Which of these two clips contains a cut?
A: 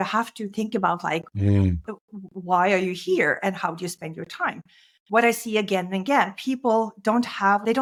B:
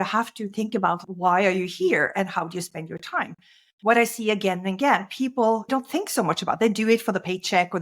B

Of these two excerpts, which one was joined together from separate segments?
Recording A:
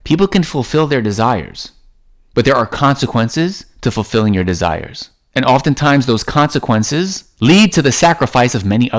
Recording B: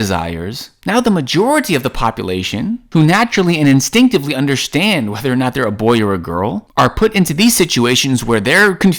B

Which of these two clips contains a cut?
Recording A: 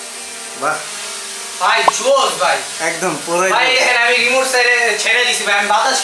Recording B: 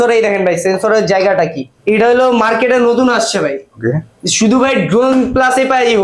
B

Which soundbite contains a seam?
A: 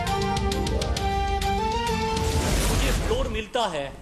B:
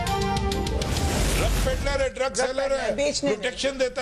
A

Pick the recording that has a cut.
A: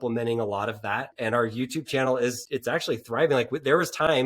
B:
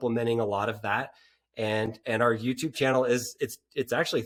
A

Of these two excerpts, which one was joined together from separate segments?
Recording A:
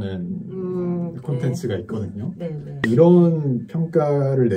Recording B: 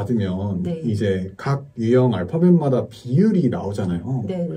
A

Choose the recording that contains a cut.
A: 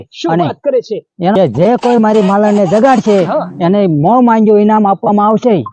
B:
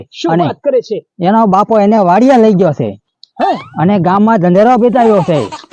A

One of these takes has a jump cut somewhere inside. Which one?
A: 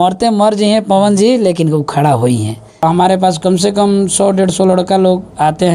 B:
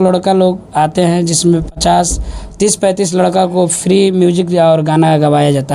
A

